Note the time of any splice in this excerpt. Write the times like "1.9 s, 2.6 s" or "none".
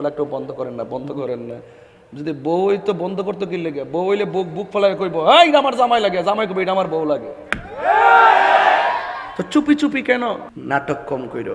10.5 s